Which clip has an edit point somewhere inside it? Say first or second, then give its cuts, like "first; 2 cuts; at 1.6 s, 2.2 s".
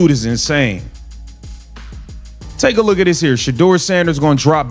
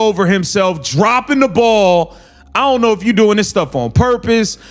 first; 2 cuts; at 0.9 s, 2.5 s